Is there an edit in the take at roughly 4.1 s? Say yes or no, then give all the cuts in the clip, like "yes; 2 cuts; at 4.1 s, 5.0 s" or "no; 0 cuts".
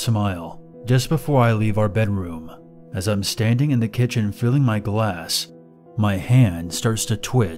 yes; 1 cut; at 4.1 s